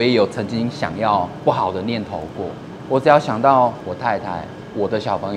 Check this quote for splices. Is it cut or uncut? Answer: cut